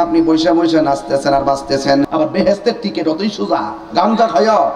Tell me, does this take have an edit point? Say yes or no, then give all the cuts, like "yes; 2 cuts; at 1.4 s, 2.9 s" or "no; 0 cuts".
yes; 1 cut; at 2.1 s